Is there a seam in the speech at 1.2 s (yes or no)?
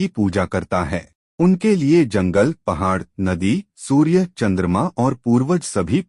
yes